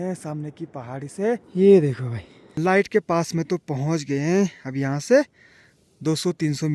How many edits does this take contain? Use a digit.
0